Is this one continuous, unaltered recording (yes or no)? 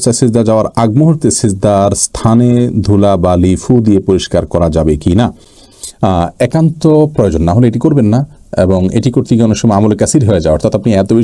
yes